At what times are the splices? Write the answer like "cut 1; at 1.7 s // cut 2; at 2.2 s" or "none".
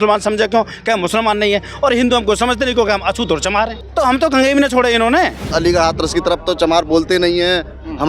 cut 1; at 3.8 s // cut 2; at 5.4 s